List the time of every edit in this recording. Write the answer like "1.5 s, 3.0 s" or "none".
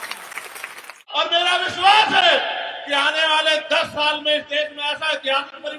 1.0 s